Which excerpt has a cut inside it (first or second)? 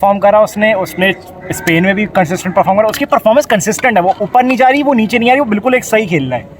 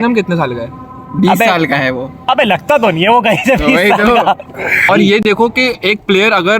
second